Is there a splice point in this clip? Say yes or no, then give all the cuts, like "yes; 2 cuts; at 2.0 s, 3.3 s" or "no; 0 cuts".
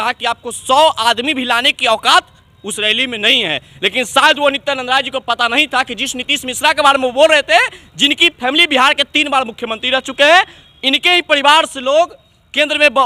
no; 0 cuts